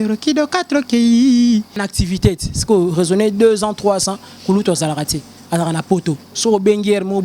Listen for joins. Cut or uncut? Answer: cut